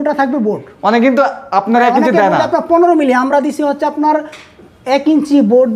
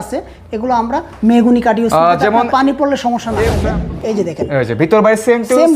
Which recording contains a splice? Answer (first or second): second